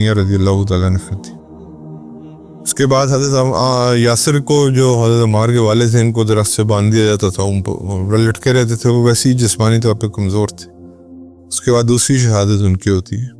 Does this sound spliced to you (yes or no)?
yes